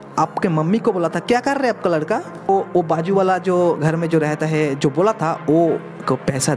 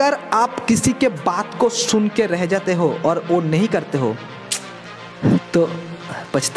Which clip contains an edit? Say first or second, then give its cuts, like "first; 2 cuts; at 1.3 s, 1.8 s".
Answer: first; 1 cut; at 2.5 s